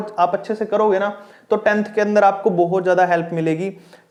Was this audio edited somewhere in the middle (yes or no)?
no